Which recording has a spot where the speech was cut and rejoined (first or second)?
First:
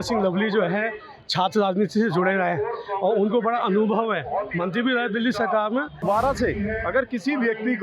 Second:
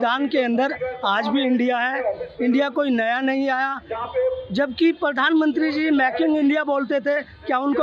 first